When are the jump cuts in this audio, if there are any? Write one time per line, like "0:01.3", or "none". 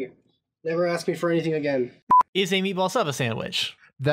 0:02.0